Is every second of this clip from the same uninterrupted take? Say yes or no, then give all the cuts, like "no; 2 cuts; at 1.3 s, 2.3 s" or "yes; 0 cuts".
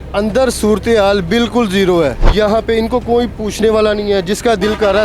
no; 1 cut; at 2.2 s